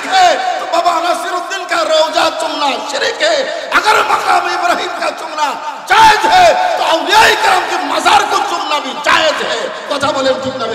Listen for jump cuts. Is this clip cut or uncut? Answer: uncut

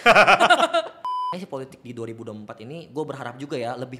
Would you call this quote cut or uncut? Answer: cut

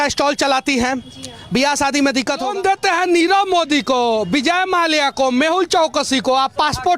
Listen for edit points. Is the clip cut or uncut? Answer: cut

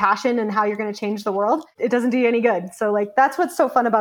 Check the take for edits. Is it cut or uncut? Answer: cut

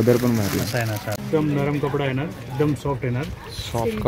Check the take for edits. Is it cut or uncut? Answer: cut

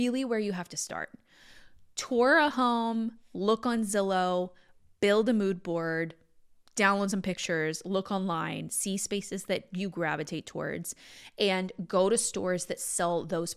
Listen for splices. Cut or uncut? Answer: uncut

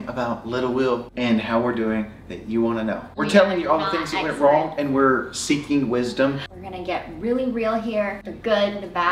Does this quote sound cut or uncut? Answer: cut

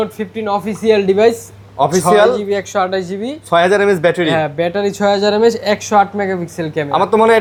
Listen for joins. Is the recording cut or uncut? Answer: uncut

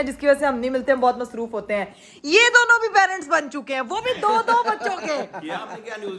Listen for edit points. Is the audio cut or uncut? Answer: uncut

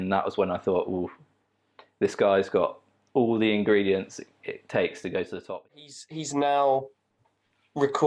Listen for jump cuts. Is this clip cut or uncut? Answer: cut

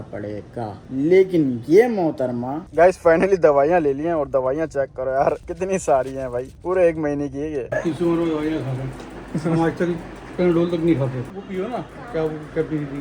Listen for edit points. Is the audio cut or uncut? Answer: cut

